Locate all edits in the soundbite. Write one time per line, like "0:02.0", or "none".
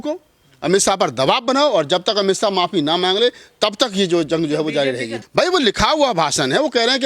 0:05.2